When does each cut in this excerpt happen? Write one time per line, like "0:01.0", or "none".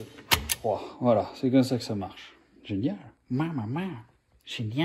none